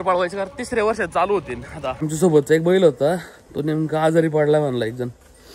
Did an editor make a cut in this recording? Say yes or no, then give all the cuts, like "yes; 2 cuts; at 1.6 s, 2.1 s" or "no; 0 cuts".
yes; 1 cut; at 2.0 s